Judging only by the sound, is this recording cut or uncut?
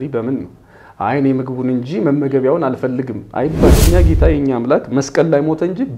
cut